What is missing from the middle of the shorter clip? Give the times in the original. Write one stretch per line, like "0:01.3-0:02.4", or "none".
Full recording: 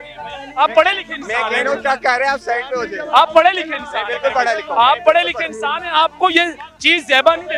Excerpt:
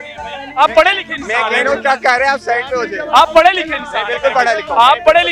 none